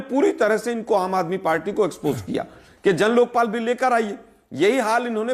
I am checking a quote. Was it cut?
no; 0 cuts

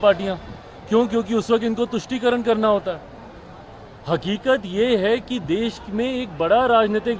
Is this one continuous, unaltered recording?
yes; 0 cuts

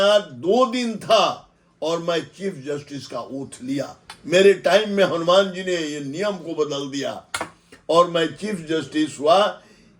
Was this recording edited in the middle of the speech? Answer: no; 0 cuts

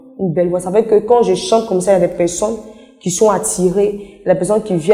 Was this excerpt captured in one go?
yes; 0 cuts

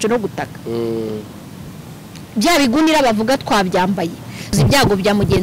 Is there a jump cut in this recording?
yes; 1 cut; at 4.5 s

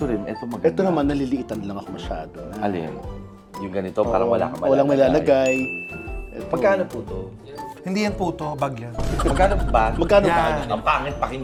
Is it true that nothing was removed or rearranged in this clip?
yes; 0 cuts

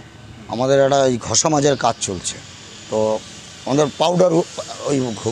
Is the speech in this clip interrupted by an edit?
no; 0 cuts

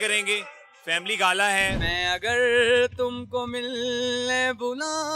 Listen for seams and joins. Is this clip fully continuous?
no; 1 cut; at 1.8 s

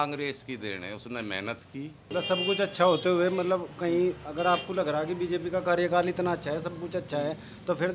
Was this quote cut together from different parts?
yes; 1 cut; at 2.0 s

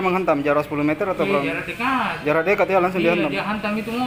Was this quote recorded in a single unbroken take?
yes; 0 cuts

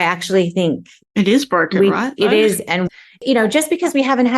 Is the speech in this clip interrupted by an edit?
yes; 2 cuts; at 0.9 s, 2.8 s

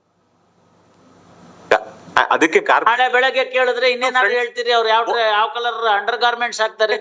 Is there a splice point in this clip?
no; 0 cuts

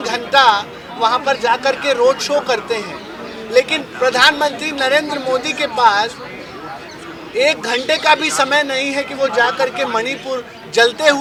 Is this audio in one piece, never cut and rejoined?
yes; 0 cuts

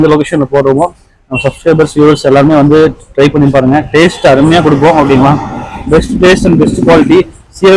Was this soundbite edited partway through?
no; 0 cuts

